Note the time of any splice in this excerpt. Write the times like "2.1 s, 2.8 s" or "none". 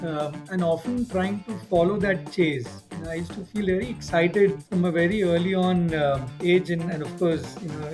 4.6 s, 6.3 s